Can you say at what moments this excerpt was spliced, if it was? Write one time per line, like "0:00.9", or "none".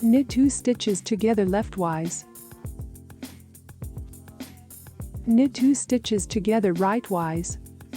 none